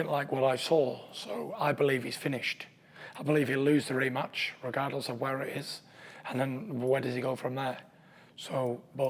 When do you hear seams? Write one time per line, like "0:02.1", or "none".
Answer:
none